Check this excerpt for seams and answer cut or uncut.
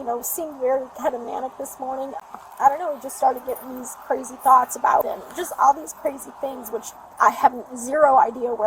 cut